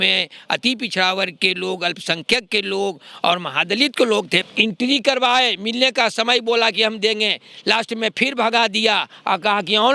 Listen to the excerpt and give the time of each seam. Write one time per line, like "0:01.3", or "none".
0:04.4